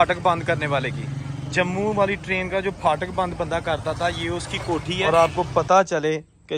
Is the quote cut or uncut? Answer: cut